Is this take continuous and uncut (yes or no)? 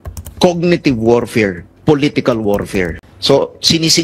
yes